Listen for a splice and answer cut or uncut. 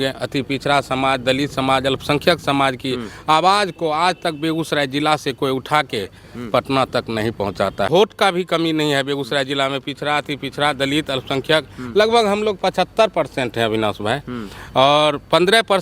cut